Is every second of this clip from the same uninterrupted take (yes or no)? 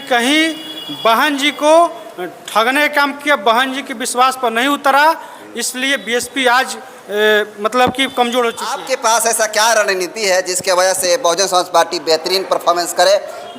no